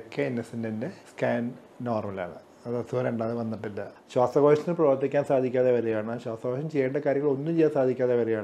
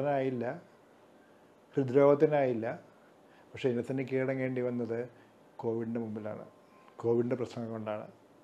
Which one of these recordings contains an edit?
first; 2 cuts; at 1.0 s, 3.9 s

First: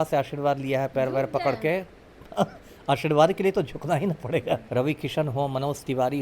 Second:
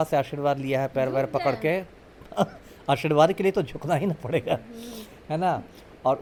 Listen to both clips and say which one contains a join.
first; 1 cut; at 4.6 s

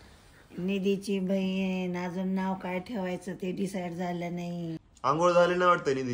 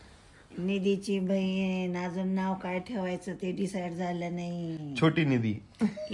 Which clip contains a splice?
first; 1 cut; at 4.8 s

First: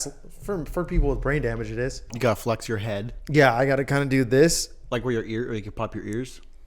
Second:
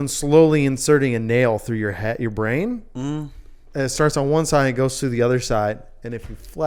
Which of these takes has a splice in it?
first; 1 cut; at 2.1 s

